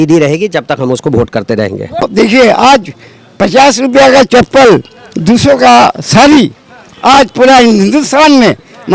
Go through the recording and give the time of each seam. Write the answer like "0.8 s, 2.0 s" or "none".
2.1 s